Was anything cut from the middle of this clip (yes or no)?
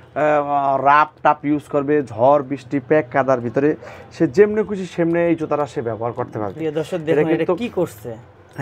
no